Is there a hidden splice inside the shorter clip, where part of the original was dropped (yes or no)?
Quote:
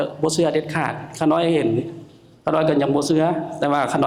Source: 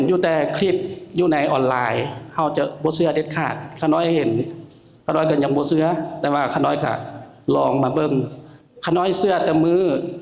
no